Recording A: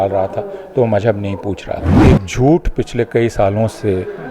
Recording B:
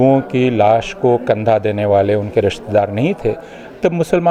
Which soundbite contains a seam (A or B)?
A